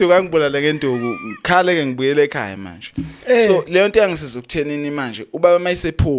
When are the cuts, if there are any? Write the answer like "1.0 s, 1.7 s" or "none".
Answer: none